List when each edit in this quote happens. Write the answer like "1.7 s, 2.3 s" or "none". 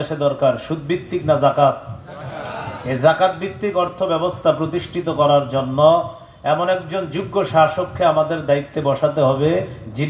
none